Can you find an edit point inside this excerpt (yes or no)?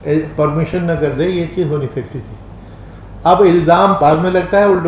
yes